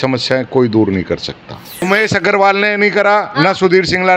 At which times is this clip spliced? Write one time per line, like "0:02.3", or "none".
0:01.8